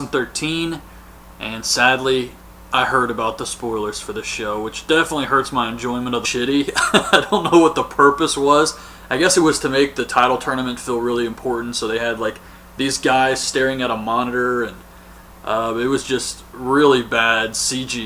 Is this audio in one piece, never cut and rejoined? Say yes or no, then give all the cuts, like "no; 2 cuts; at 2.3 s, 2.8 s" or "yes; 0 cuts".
yes; 0 cuts